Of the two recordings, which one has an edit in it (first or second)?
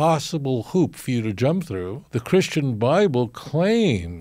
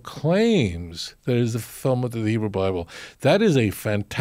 first